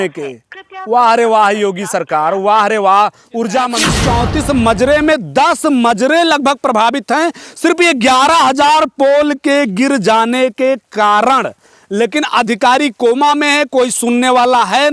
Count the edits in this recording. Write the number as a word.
one